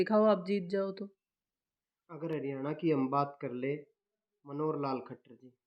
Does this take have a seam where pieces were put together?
no; 0 cuts

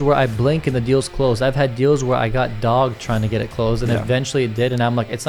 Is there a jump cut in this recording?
no; 0 cuts

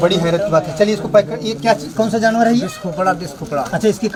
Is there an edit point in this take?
no; 0 cuts

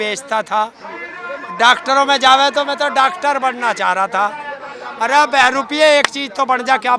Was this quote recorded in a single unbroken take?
yes; 0 cuts

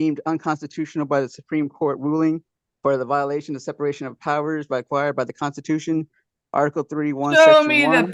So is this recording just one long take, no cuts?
yes; 0 cuts

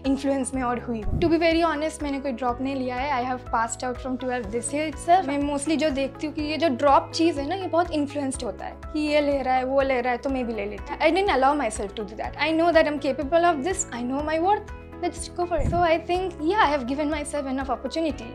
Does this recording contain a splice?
yes; 5 cuts; at 1.2 s, 5.3 s, 10.9 s, 12.3 s, 15.7 s

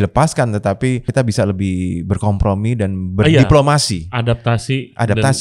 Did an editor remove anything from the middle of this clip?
yes; 1 cut; at 1.1 s

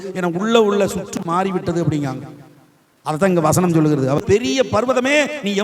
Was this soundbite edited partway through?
yes; 1 cut; at 4.2 s

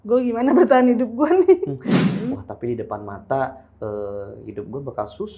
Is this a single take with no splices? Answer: no; 1 cut; at 1.8 s

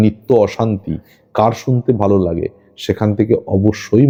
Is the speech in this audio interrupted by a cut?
no; 0 cuts

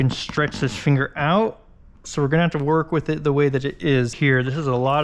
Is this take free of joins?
no; 1 cut; at 4.1 s

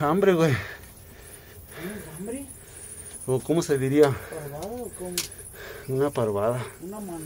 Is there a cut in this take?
no; 0 cuts

